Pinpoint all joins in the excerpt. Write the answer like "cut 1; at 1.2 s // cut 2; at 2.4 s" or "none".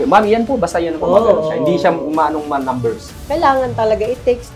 cut 1; at 3.1 s